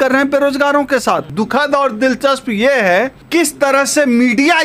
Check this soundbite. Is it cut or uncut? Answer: cut